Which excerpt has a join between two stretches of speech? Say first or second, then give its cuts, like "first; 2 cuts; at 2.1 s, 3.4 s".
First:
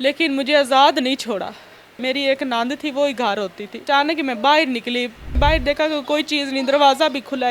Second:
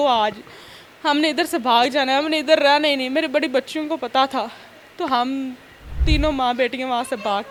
first; 3 cuts; at 2.0 s, 3.8 s, 5.3 s